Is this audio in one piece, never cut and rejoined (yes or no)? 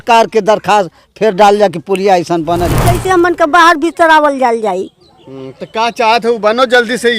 no